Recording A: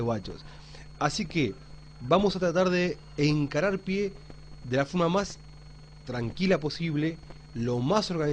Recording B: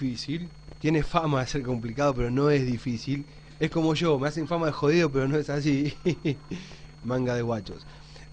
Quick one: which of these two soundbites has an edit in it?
B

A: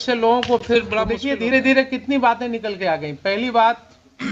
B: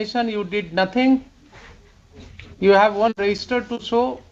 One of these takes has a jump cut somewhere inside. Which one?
A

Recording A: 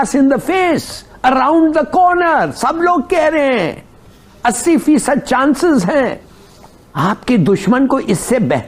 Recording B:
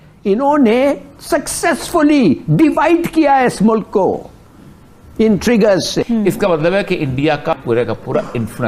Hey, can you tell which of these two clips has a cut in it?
B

